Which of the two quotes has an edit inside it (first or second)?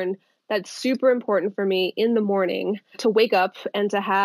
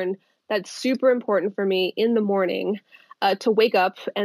first